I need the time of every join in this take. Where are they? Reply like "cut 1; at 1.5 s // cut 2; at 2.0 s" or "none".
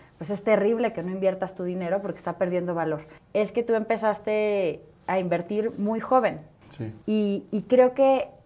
cut 1; at 3.1 s